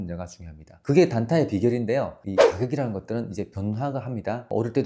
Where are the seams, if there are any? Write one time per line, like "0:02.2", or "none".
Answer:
0:02.2